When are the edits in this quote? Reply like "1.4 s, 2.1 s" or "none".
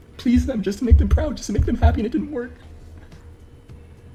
none